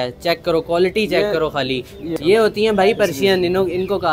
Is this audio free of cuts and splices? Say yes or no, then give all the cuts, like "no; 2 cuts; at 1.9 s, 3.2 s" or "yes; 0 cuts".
no; 1 cut; at 2.1 s